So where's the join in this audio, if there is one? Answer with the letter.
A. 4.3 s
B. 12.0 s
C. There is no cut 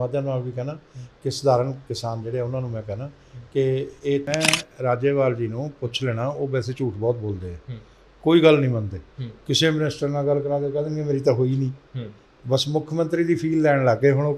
A